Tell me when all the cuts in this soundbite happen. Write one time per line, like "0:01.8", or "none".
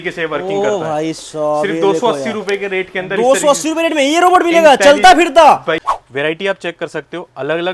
0:05.8